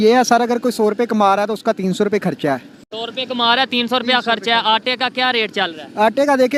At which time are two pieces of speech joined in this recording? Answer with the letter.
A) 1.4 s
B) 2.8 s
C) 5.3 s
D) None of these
D